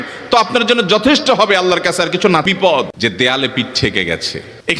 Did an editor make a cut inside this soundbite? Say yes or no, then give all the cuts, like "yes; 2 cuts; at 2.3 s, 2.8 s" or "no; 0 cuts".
yes; 1 cut; at 2.5 s